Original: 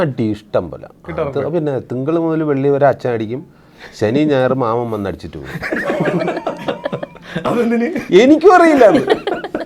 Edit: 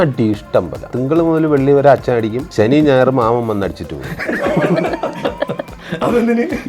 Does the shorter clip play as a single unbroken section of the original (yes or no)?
no